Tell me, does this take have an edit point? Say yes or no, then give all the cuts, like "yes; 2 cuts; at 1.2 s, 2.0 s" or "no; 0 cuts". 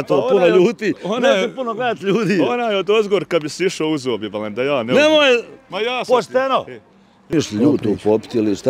yes; 1 cut; at 7.3 s